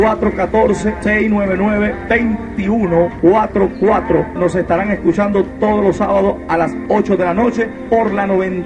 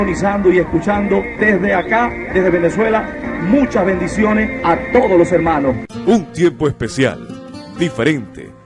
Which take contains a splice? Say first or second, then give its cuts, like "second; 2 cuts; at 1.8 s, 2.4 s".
second; 1 cut; at 5.9 s